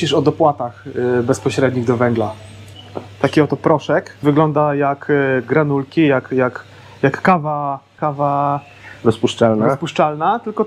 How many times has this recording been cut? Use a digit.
3